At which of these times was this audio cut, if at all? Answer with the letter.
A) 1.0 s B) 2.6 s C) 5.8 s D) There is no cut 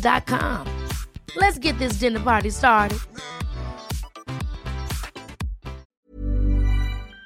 C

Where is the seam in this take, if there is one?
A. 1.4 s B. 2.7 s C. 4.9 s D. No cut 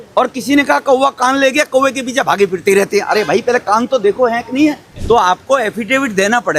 C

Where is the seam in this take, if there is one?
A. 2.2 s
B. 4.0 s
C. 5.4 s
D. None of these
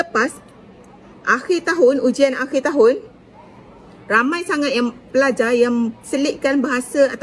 D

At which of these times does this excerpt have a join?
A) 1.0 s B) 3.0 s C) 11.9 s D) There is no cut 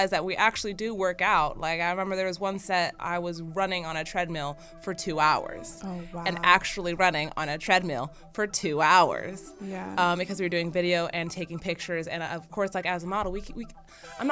B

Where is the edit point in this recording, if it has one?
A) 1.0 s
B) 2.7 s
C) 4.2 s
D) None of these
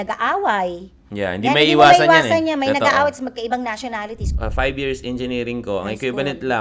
C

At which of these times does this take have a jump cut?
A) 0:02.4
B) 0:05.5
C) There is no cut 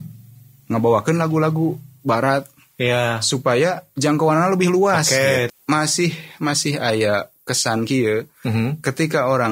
B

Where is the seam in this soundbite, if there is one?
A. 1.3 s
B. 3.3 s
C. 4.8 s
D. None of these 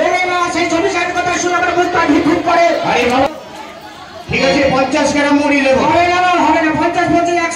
B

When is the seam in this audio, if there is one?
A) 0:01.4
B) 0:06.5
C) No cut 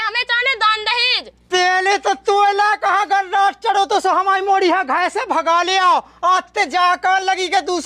A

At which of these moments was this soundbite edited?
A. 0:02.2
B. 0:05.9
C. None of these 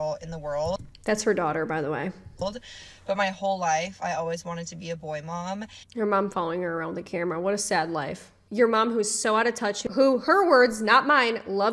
B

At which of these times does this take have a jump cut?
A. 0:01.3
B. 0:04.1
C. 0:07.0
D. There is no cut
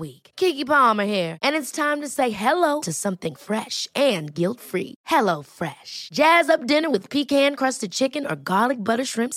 D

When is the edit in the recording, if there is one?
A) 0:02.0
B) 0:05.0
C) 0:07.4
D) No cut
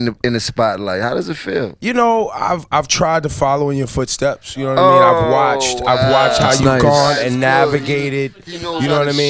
D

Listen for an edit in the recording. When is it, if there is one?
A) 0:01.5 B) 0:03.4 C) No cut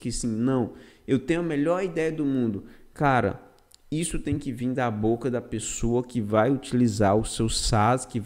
C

